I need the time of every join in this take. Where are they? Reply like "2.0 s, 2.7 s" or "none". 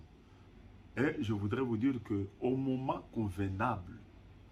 none